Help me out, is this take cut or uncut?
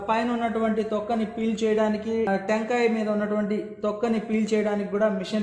uncut